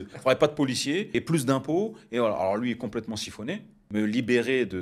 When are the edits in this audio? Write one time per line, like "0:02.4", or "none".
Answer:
0:01.1
0:03.7